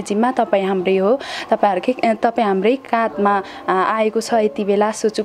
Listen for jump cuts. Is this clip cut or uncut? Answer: uncut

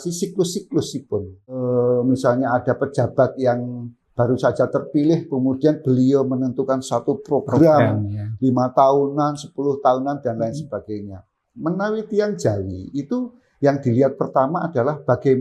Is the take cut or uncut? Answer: cut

